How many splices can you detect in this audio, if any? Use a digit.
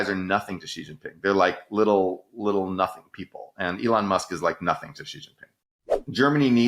1